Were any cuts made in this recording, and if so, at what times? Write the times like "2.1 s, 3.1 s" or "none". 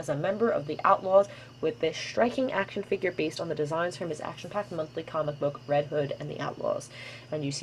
5.7 s

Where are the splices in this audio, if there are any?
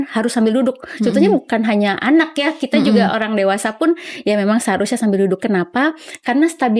none

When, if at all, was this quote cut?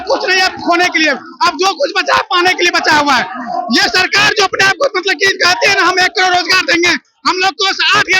none

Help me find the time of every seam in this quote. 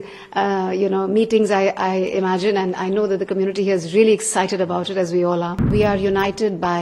5.6 s

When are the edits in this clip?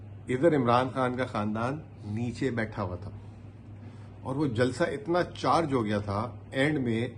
none

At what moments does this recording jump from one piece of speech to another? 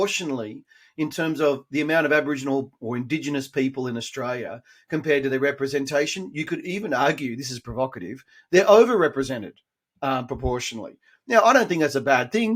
none

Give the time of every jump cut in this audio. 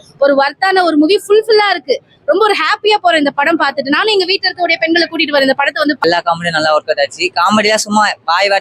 6.0 s

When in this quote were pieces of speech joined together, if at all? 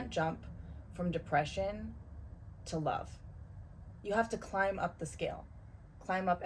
none

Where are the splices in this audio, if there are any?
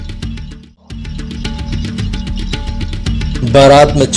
1.3 s

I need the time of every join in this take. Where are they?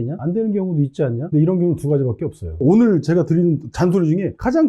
1.3 s, 2.6 s

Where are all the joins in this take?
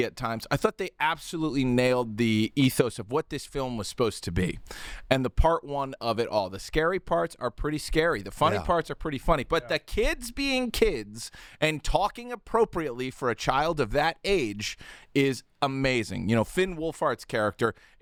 none

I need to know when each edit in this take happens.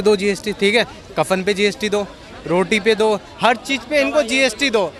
none

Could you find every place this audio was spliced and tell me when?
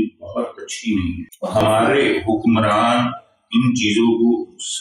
1.5 s

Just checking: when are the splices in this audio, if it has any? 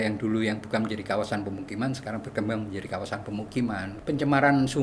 3.9 s

